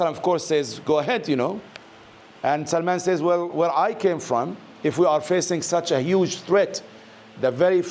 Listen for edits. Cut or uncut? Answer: uncut